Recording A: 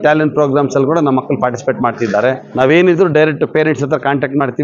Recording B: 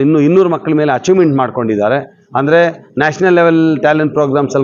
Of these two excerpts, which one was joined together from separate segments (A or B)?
A